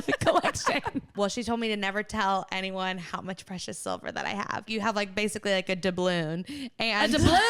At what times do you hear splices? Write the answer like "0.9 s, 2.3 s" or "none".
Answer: 1.1 s, 4.7 s